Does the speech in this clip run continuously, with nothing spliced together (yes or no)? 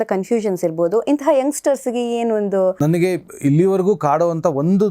no